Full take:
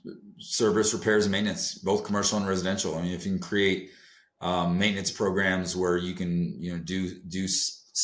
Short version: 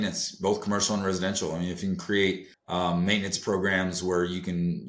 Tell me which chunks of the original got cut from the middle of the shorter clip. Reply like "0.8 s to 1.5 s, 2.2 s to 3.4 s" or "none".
4.0 s to 4.3 s